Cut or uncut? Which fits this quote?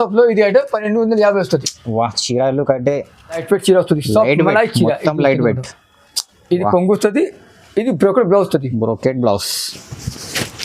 cut